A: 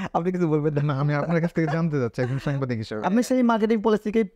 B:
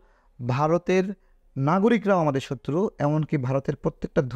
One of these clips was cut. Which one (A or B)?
A